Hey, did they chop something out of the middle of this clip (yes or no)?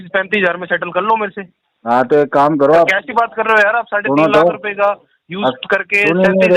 no